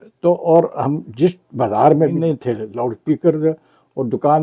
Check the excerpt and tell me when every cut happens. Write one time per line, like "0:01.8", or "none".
0:02.2